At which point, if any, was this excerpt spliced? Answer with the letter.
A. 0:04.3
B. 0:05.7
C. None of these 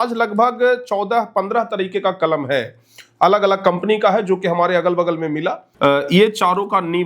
B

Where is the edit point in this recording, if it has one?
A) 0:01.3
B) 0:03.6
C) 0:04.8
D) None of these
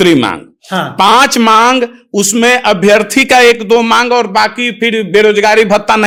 D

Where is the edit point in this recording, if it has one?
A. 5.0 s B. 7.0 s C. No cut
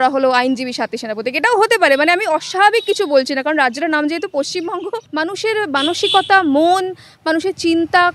A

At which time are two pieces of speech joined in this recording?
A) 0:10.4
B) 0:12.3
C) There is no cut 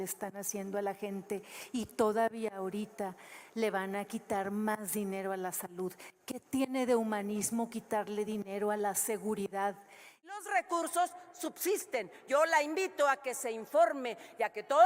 A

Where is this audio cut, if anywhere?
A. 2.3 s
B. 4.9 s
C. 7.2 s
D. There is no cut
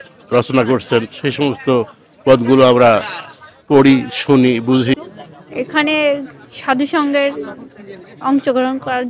B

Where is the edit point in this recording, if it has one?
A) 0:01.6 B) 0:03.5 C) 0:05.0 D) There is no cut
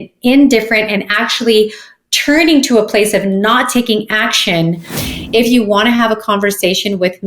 C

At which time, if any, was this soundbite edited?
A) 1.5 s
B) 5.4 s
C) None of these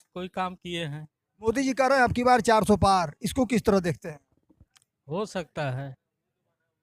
A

